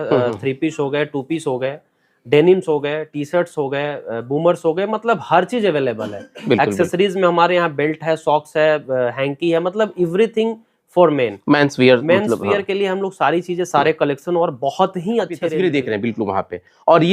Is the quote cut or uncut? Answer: uncut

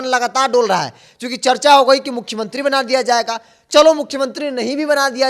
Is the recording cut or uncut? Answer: uncut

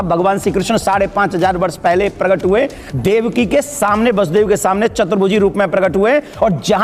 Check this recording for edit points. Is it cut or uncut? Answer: uncut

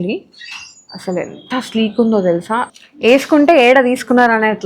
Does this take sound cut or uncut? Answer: cut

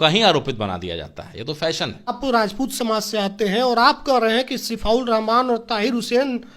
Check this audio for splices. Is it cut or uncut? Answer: cut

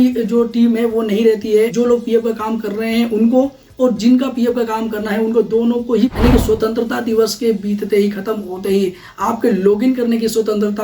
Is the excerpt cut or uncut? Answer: cut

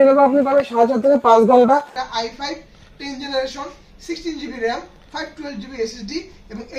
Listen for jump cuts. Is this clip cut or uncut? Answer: cut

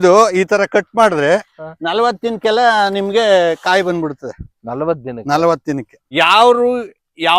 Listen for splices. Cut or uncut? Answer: cut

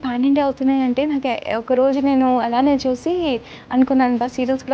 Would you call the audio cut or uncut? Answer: uncut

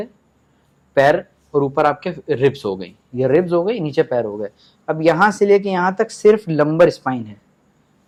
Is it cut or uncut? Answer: uncut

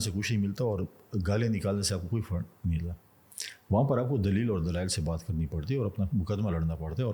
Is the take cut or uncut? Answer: uncut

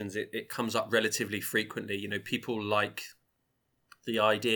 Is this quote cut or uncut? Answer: uncut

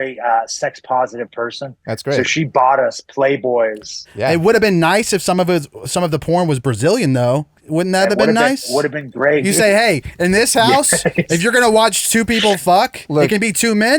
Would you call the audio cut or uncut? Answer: cut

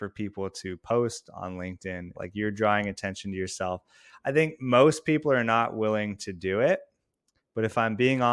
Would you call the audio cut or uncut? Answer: cut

